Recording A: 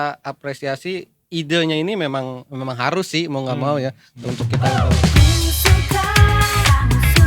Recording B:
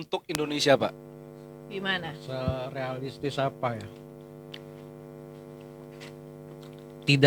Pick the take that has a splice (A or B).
A